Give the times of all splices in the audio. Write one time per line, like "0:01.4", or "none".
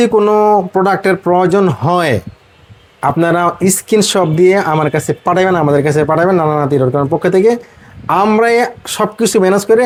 none